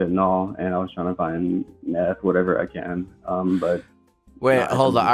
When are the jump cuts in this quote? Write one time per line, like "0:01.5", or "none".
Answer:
none